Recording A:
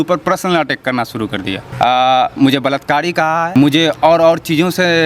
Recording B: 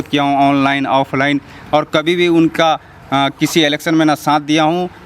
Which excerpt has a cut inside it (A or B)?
A